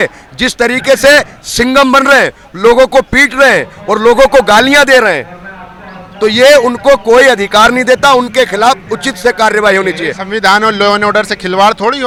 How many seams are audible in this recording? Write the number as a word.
zero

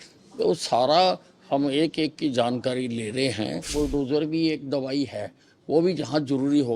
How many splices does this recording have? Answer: one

